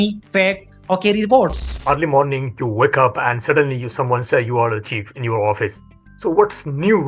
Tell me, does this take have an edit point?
yes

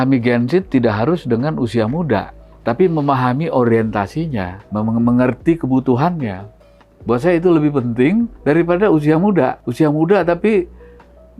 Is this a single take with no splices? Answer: no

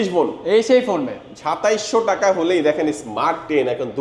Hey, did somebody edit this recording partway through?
no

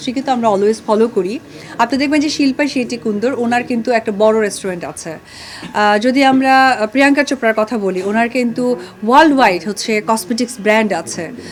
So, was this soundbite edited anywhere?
no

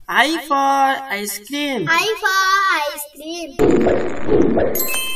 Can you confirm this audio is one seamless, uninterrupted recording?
no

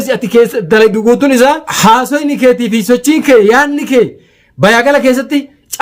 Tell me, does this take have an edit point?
yes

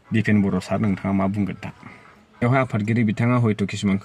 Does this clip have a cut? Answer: yes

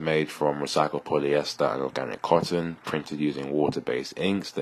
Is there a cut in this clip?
no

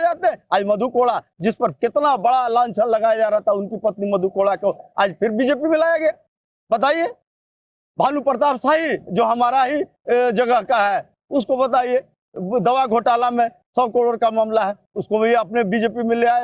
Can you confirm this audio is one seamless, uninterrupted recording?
yes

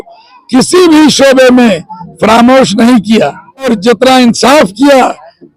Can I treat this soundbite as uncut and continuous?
no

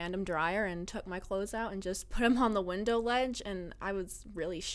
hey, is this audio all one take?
yes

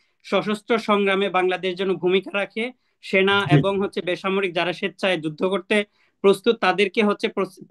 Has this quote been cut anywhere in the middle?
no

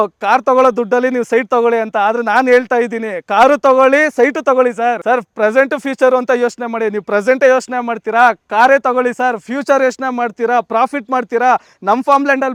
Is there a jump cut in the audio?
no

